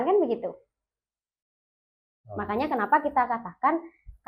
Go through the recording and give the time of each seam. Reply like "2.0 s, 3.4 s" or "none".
none